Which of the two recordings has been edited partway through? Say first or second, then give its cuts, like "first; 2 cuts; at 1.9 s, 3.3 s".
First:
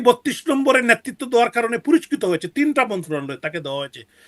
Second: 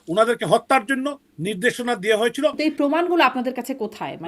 second; 1 cut; at 2.6 s